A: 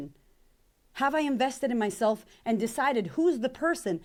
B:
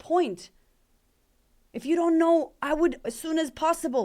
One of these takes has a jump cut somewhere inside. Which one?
B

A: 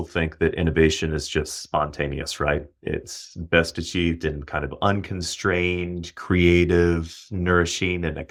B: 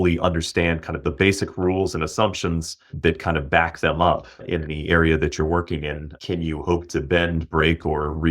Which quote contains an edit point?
B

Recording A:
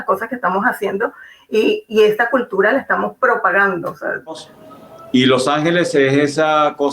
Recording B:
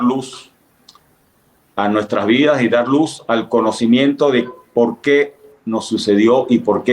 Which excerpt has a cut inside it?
A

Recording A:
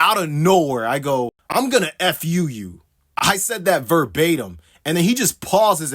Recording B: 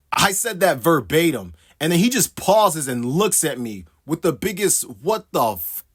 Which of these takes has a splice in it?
A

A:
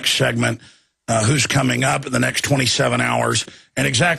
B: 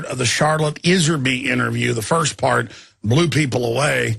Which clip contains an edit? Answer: B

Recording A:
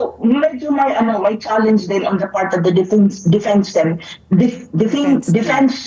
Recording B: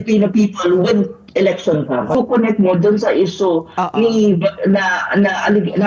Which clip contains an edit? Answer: B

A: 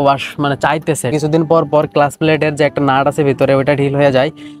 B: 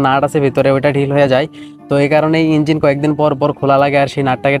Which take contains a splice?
A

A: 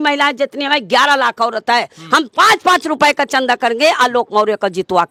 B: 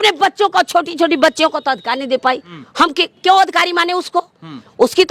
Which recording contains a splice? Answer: B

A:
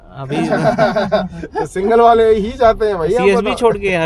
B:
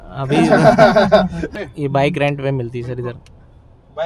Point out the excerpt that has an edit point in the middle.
B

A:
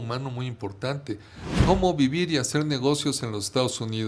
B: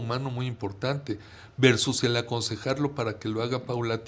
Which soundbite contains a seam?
A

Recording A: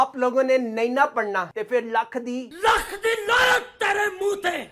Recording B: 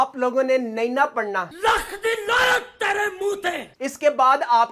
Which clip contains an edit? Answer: B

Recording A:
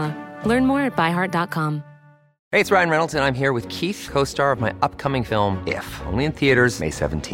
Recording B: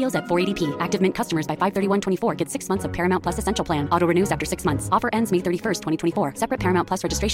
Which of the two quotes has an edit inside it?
A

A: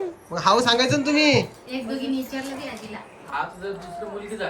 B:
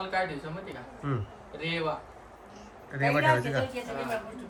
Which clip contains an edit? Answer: A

